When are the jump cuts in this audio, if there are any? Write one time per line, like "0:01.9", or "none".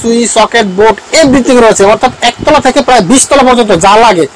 none